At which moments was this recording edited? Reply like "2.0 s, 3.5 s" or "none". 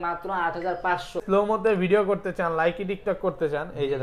1.2 s